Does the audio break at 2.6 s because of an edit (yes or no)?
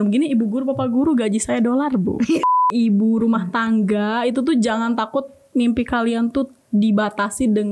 yes